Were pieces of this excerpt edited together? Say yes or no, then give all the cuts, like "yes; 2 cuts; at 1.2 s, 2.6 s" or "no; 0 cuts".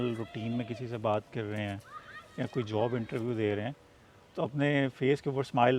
no; 0 cuts